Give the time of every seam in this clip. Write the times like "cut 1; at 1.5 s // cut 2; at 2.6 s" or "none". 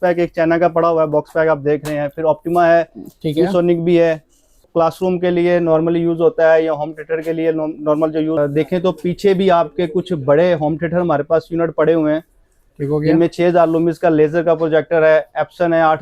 cut 1; at 4.7 s // cut 2; at 8.4 s